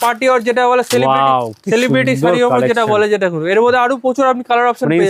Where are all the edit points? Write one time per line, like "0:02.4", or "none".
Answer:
none